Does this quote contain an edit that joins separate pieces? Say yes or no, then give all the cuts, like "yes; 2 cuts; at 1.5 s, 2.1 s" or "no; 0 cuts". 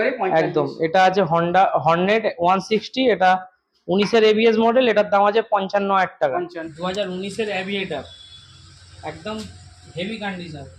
yes; 1 cut; at 6.6 s